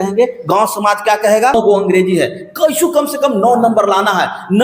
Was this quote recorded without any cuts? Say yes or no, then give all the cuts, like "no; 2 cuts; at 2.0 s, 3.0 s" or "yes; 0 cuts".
no; 1 cut; at 1.5 s